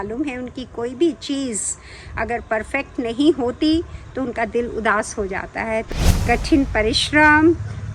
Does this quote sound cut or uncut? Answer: cut